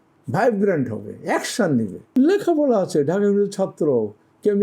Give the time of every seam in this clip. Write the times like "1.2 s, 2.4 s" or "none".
2.0 s